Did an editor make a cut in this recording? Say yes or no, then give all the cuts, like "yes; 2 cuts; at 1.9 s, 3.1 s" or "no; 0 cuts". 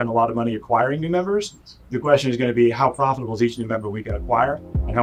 no; 0 cuts